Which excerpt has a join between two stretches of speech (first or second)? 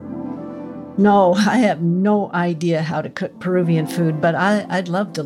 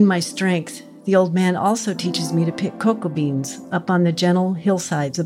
first